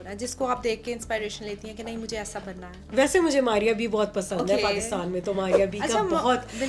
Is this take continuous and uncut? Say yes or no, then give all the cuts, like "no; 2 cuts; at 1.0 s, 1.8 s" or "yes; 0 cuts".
yes; 0 cuts